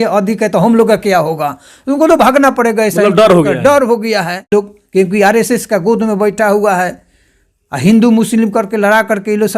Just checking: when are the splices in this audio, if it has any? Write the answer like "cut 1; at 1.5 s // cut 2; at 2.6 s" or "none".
cut 1; at 4.5 s